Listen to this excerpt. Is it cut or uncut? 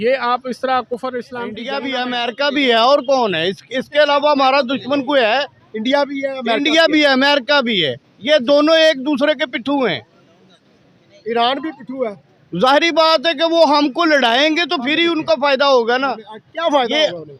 cut